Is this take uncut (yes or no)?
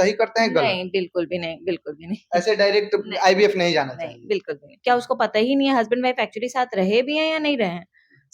no